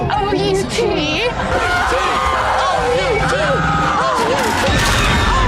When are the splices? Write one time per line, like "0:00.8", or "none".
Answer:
0:01.5